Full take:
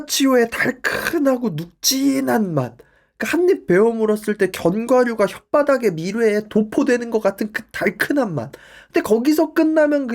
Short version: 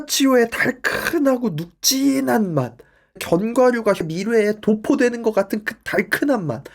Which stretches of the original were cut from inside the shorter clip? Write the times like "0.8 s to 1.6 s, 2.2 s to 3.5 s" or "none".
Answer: 3.2 s to 4.5 s, 5.4 s to 6.0 s